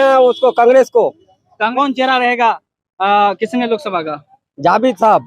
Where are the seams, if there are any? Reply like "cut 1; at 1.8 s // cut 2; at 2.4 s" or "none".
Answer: cut 1; at 1.7 s